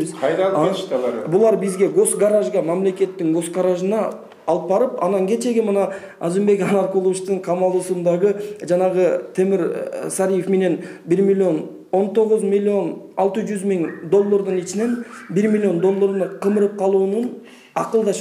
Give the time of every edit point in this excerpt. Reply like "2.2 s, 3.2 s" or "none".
none